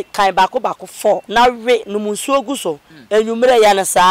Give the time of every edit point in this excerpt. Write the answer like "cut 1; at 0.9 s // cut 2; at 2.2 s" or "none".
cut 1; at 1.2 s

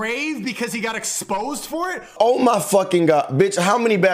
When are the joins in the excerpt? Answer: cut 1; at 2.2 s

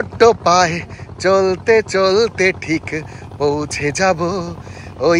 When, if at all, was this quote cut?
none

